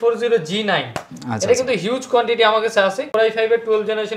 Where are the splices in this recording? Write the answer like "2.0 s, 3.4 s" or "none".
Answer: 3.1 s